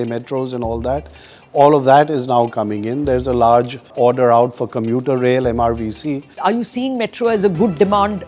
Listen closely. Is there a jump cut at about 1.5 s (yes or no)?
no